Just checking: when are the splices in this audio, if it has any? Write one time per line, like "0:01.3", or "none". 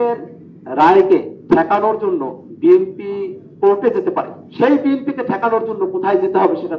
0:01.3
0:02.4
0:03.4
0:04.4